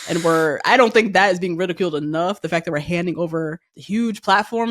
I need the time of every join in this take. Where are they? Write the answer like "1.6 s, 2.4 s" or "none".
3.7 s